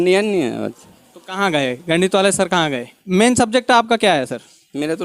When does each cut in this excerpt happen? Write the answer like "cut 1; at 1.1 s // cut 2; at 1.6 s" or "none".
cut 1; at 2.9 s